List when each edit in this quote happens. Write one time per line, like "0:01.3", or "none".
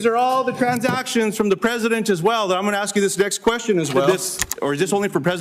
0:04.1